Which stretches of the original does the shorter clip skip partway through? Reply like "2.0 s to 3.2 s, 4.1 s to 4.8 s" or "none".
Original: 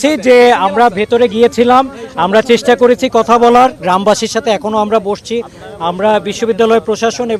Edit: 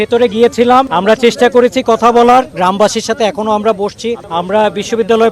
1.9 s to 2.2 s, 5.5 s to 5.7 s